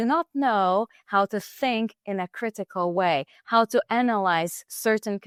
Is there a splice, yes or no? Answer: no